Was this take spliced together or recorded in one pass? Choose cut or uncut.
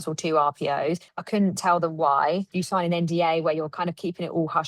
cut